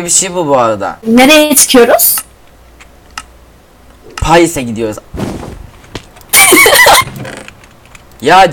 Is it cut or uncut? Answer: uncut